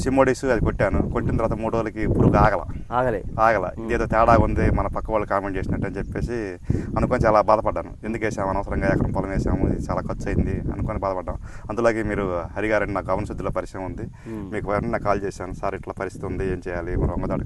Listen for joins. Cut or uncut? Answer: uncut